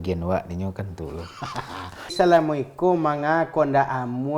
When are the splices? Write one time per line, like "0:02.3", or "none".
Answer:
0:02.1

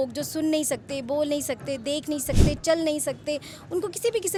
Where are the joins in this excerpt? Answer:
none

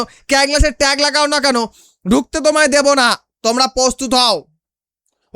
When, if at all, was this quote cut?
0:03.3

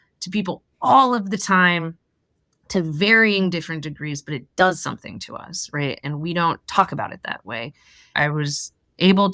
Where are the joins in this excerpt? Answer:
0:08.1

